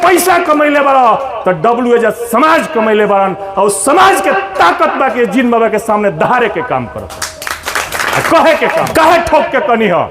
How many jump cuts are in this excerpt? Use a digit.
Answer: 1